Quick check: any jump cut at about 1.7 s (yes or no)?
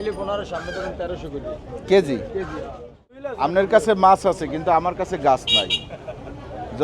no